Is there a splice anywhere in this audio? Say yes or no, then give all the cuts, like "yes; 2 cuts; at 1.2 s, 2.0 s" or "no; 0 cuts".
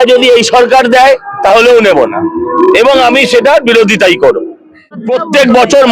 yes; 1 cut; at 5.0 s